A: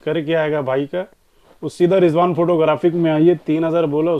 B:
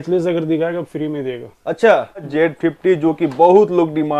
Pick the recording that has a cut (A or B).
B